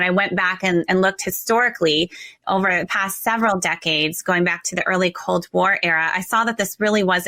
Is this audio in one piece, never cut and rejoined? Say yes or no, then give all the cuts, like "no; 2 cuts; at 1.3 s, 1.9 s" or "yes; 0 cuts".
yes; 0 cuts